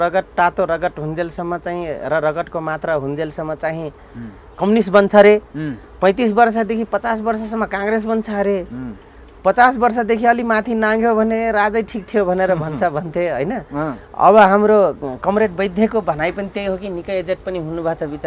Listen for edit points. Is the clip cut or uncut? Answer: uncut